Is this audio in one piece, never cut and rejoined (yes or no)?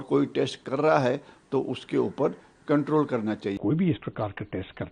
no